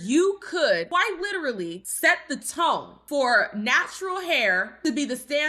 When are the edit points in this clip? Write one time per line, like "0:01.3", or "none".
0:00.9
0:01.8